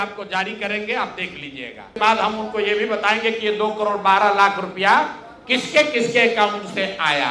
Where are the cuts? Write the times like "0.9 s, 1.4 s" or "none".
1.9 s